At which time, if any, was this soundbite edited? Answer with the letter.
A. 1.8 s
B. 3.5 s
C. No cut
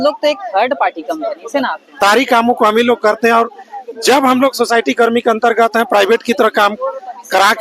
A